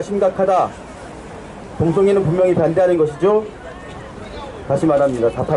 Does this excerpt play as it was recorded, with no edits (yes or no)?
yes